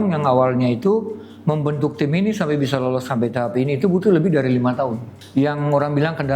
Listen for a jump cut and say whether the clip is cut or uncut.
cut